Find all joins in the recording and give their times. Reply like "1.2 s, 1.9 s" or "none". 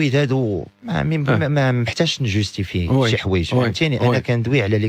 none